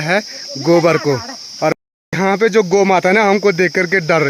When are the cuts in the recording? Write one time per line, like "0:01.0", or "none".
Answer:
0:01.8